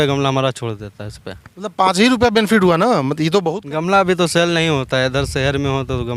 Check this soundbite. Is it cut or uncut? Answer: cut